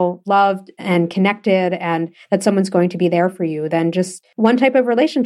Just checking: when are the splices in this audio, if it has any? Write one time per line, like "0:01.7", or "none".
0:04.2